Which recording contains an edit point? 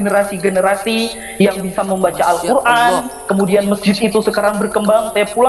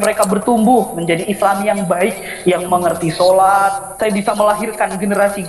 second; 1 cut; at 3.9 s

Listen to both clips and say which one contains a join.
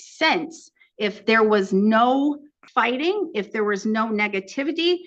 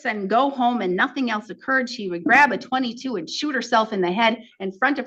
first; 1 cut; at 2.5 s

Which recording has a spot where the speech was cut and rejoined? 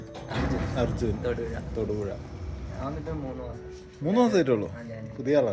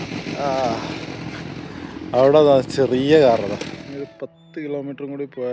second; 1 cut; at 3.8 s

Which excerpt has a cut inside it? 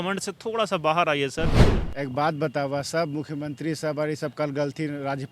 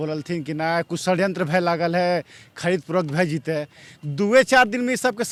first; 1 cut; at 1.6 s

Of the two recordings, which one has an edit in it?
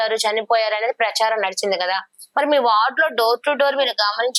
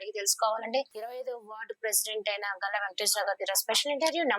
second; 1 cut; at 0.9 s

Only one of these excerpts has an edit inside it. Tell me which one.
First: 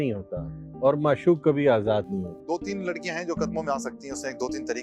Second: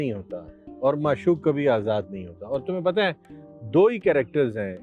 first; 1 cut; at 2.4 s

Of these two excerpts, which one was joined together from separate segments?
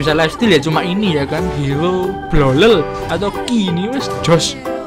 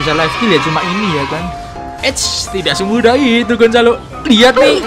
second; 1 cut; at 1.4 s

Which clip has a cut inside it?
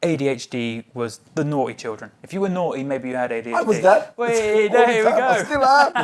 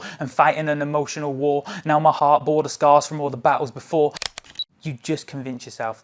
second; 1 cut; at 4.2 s

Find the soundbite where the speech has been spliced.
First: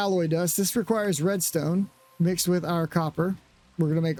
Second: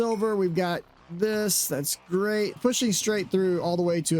second; 1 cut; at 2.6 s

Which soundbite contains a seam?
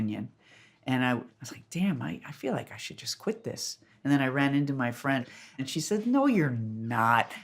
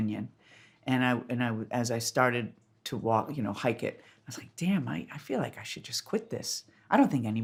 first; 3 cuts; at 1.3 s, 3.9 s, 5.3 s

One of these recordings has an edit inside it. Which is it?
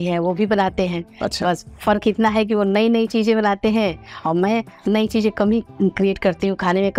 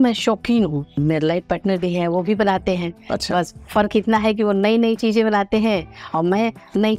second; 1 cut; at 0.9 s

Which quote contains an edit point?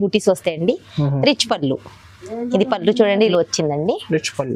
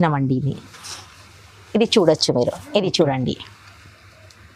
first; 1 cut; at 3.3 s

